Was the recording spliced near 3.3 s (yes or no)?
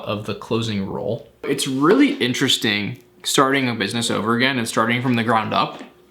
no